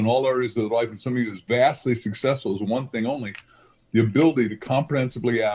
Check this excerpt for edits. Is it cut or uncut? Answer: uncut